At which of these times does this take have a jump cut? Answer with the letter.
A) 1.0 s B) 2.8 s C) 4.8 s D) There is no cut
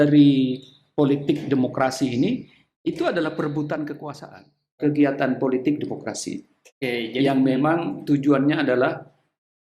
C